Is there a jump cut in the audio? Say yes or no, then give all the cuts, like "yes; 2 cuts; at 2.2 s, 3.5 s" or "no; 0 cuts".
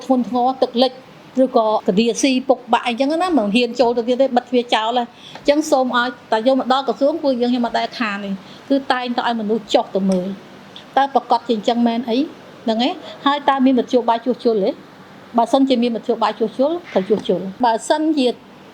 yes; 2 cuts; at 1.8 s, 17.6 s